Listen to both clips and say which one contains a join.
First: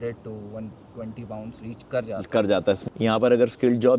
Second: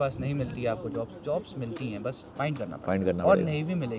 first; 1 cut; at 2.8 s

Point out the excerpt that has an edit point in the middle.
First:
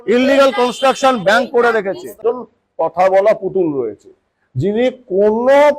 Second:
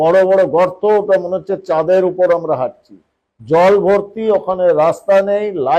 first; 1 cut; at 2.0 s

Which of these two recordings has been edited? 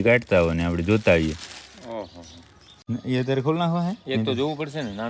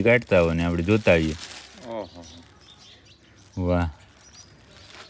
first; 1 cut; at 2.7 s

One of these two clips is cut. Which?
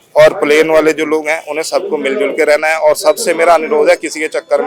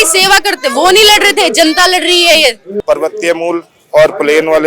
second; 1 cut; at 2.7 s

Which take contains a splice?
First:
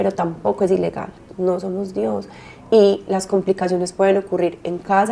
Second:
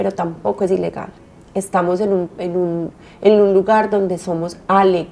first; 1 cut; at 1.3 s

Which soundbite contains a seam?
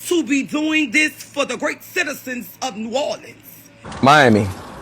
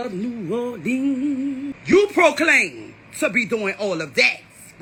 first; 1 cut; at 3.9 s

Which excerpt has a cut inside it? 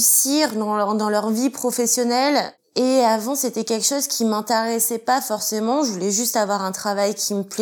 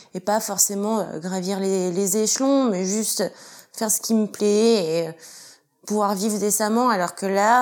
first; 1 cut; at 2.6 s

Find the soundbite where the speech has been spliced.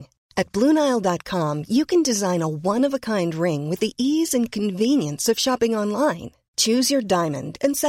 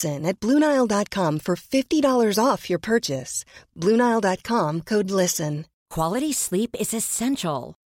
second; 1 cut; at 5.8 s

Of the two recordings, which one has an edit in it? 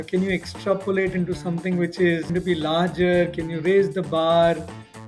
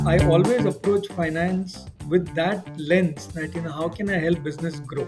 first; 1 cut; at 2.3 s

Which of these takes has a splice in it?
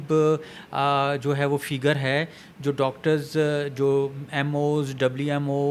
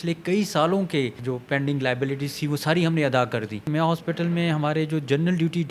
second; 2 cuts; at 1.2 s, 3.6 s

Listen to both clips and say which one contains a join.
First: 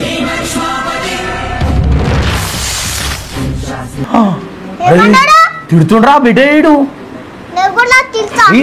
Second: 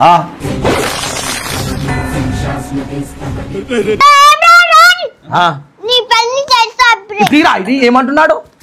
second; 1 cut; at 4.0 s

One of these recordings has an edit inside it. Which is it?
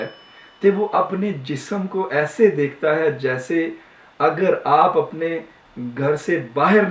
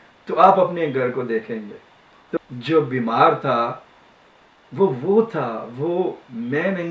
second; 1 cut; at 2.4 s

